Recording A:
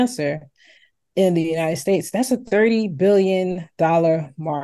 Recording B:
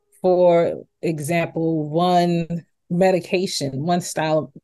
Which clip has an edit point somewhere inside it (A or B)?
B